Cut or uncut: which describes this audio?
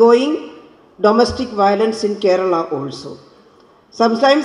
uncut